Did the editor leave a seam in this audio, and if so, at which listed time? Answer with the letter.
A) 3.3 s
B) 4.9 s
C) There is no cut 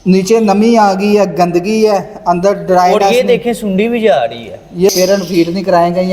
B